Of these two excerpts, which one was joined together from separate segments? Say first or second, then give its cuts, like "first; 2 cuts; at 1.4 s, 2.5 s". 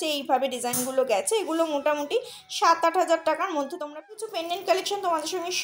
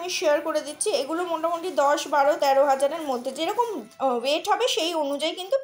first; 1 cut; at 4.2 s